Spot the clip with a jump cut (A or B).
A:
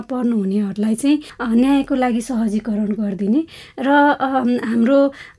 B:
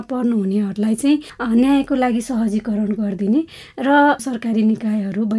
B